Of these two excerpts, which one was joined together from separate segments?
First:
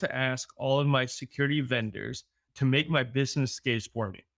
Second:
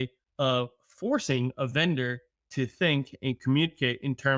first; 1 cut; at 2.4 s

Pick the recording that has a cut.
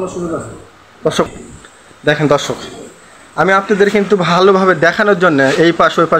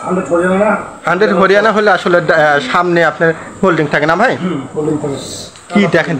first; 1 cut; at 1.3 s

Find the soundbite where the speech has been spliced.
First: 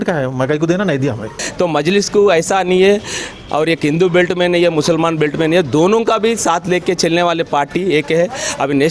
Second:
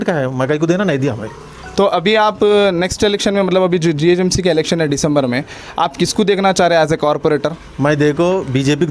first; 1 cut; at 1.4 s

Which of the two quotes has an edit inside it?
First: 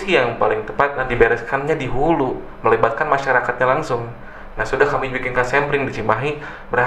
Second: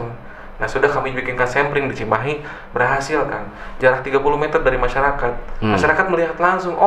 first; 1 cut; at 1.0 s

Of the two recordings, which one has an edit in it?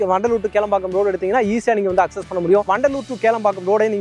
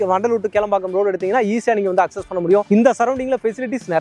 first; 1 cut; at 2.7 s

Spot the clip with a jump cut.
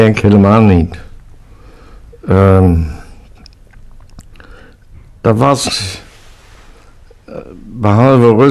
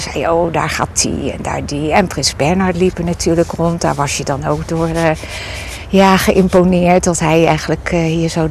first; 1 cut; at 1.0 s

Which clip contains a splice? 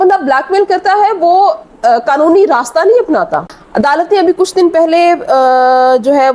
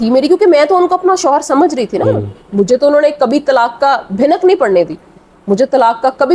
first; 1 cut; at 3.5 s

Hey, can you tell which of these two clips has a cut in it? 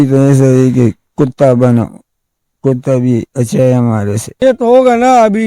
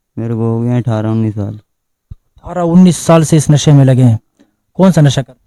first; 1 cut; at 4.4 s

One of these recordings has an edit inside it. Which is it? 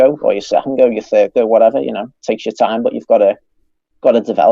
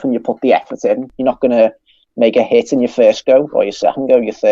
second; 1 cut; at 1.1 s

